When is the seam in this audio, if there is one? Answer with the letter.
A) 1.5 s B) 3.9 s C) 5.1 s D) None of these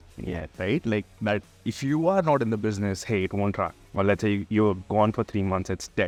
D